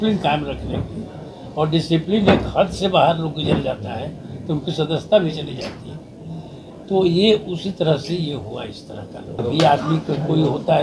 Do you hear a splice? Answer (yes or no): yes